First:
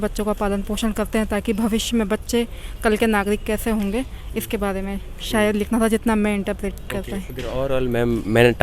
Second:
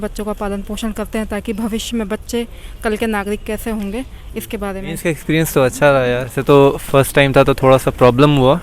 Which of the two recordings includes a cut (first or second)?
second